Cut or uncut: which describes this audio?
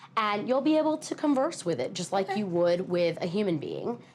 uncut